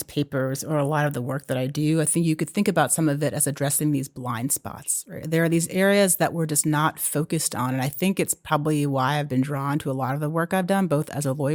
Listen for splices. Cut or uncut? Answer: uncut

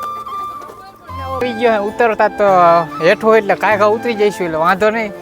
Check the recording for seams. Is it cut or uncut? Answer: cut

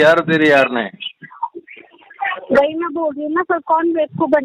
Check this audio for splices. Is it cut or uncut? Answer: uncut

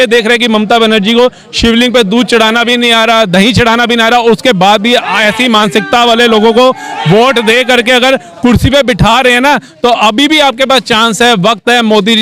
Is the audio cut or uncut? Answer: uncut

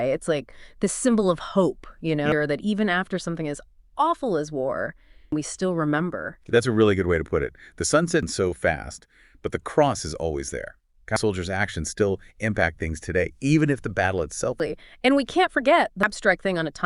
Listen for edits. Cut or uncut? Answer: cut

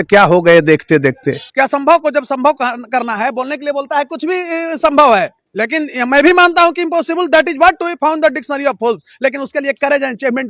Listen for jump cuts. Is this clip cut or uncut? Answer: cut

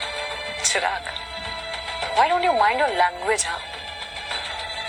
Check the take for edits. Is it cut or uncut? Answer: uncut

